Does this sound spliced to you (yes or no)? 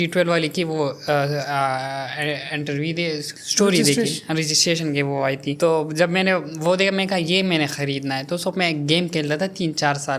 no